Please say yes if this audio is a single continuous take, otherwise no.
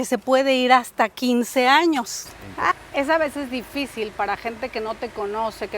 no